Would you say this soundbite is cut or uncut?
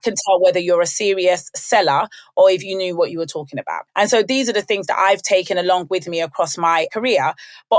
uncut